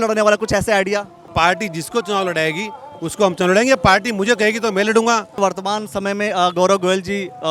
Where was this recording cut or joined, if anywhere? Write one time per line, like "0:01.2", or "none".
0:01.2
0:05.4